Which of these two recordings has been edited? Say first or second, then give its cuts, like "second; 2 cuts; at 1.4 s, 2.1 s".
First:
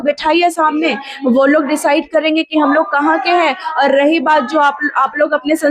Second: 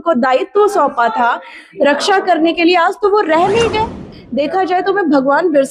second; 1 cut; at 4.1 s